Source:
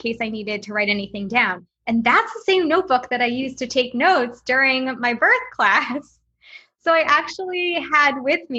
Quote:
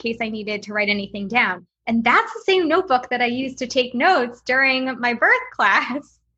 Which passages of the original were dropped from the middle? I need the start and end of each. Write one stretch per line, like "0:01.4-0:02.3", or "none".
none